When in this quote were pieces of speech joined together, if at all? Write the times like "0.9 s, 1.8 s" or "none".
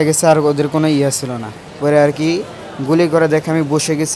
1.6 s